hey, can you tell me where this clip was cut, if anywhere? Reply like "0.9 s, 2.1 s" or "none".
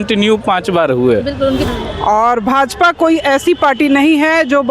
1.7 s

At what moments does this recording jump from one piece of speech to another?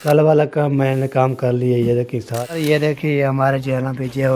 2.3 s

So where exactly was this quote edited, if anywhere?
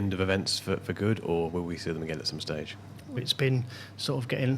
3.0 s

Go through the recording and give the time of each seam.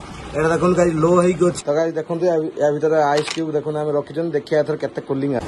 1.6 s

